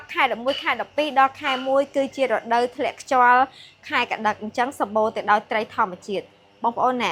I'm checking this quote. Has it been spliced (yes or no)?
no